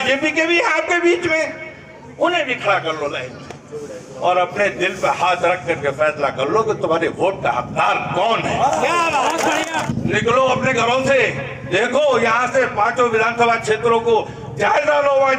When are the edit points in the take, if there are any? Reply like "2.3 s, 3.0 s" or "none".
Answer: 9.9 s